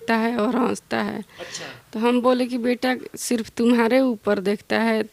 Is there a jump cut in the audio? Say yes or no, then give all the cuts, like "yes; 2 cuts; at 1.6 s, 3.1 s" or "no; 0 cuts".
no; 0 cuts